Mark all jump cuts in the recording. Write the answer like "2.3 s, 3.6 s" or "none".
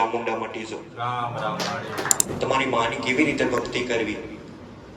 2.2 s